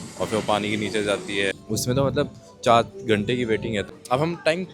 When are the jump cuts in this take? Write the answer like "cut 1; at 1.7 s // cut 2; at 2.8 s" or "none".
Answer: cut 1; at 1.6 s // cut 2; at 3.9 s